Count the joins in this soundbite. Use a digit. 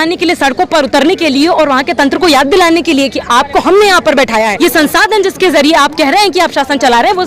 1